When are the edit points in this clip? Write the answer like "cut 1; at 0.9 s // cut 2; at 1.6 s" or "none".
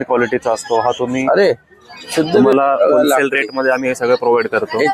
cut 1; at 2.5 s

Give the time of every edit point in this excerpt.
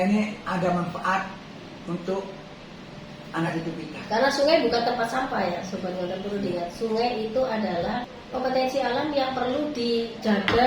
cut 1; at 8.2 s

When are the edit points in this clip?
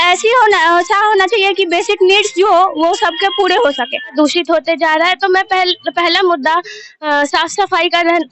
cut 1; at 4.1 s

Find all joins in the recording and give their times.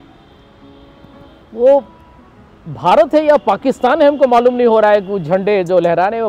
none

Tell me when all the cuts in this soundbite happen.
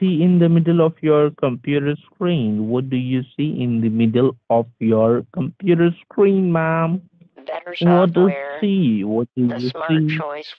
none

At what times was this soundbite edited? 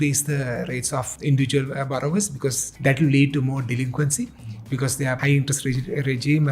cut 1; at 1.1 s // cut 2; at 2.7 s // cut 3; at 5.2 s

